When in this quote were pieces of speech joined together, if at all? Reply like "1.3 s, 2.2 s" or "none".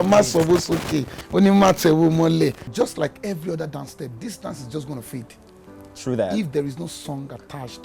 2.6 s